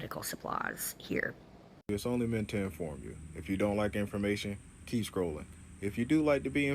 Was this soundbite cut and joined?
yes; 1 cut; at 1.9 s

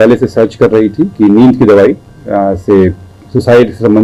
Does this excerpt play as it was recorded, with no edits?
yes; 0 cuts

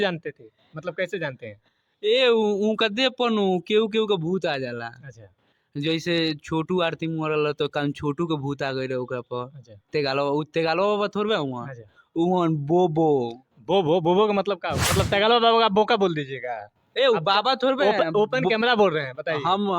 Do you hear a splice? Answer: yes; 1 cut; at 14.9 s

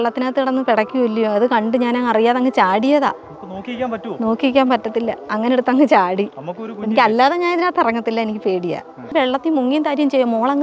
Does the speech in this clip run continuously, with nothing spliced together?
yes; 0 cuts

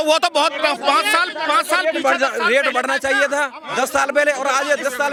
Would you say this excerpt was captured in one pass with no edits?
yes; 0 cuts

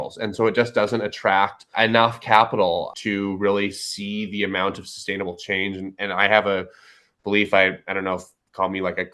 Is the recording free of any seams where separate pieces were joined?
no; 2 cuts; at 1.7 s, 2.9 s

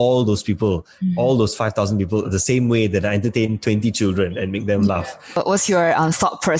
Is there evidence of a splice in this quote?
yes; 1 cut; at 5.2 s

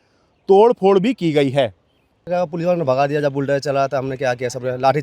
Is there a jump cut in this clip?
yes; 1 cut; at 2.3 s

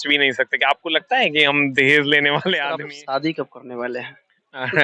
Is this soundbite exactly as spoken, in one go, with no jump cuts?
no; 1 cut; at 2.6 s

